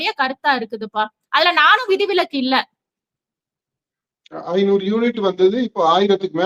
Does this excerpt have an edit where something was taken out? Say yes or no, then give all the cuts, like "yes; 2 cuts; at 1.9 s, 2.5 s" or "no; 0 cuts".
no; 0 cuts